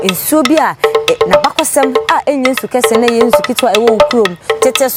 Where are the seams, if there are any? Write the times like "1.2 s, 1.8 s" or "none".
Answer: none